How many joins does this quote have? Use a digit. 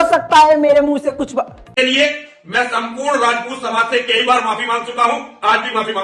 1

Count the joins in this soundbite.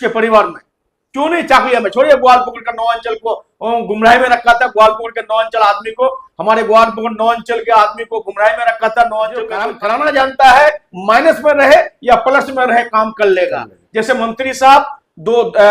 1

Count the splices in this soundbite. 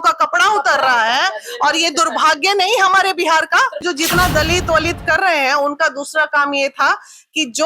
1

